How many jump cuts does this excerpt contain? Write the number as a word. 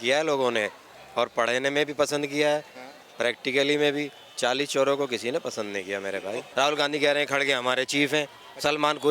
one